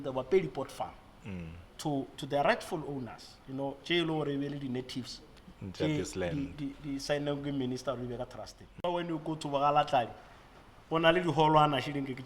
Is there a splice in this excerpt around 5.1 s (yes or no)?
no